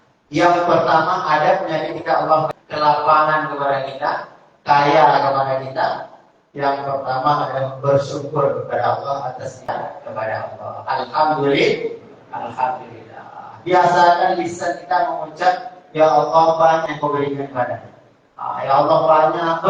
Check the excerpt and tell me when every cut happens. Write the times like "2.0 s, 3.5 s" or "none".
2.5 s, 9.7 s, 16.9 s